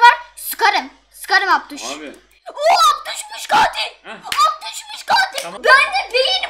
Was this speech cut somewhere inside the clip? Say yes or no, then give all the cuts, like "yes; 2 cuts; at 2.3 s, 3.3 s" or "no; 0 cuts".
yes; 1 cut; at 5.5 s